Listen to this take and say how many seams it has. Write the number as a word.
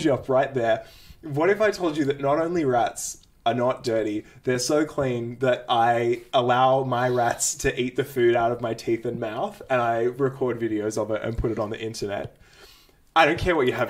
zero